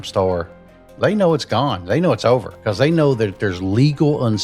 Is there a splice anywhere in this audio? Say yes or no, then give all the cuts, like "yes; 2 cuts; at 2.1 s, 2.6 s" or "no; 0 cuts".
yes; 1 cut; at 2.5 s